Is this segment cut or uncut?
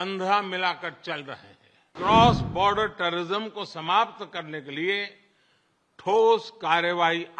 cut